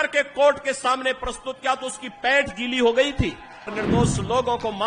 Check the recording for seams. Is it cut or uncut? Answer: cut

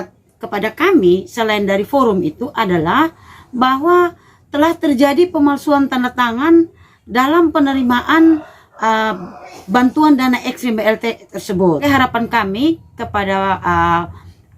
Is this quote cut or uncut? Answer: cut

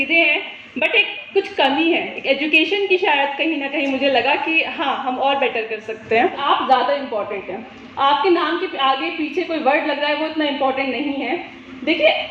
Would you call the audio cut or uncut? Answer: cut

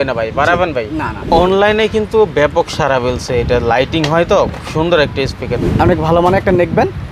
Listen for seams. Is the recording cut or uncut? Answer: cut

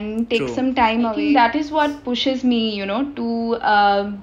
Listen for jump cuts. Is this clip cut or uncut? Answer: cut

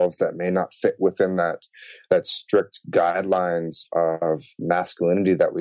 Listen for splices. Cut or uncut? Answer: cut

